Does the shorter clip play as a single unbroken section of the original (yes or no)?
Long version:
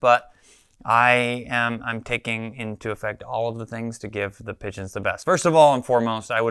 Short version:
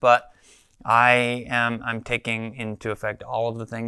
yes